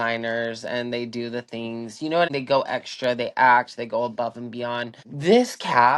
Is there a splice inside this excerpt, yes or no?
yes